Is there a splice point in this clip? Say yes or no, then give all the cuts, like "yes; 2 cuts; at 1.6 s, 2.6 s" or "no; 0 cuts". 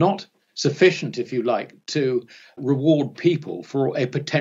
yes; 1 cut; at 2.6 s